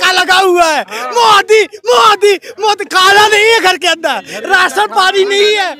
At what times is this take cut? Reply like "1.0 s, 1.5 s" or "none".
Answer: none